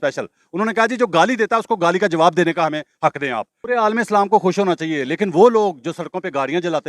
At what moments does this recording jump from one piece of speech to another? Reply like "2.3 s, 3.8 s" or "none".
3.5 s

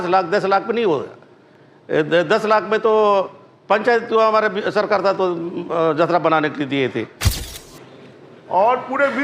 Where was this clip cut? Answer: 7.2 s

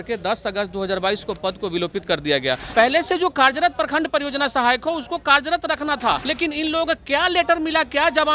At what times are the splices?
2.6 s, 6.3 s

